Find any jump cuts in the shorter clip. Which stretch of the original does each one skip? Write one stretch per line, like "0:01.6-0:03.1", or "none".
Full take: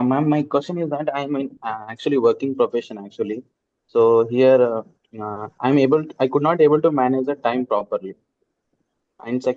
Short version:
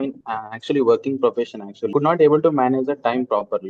0:03.3-0:06.3